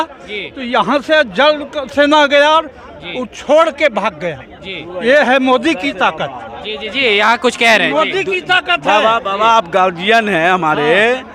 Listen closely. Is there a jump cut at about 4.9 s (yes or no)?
no